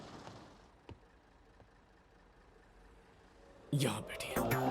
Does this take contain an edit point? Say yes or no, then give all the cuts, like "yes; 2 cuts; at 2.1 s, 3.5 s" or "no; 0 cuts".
no; 0 cuts